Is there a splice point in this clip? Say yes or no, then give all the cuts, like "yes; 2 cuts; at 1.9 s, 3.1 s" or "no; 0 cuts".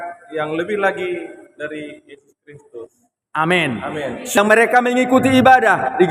yes; 1 cut; at 4.4 s